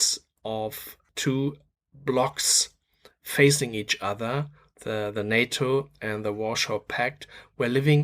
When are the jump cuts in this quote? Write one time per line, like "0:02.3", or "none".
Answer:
0:01.0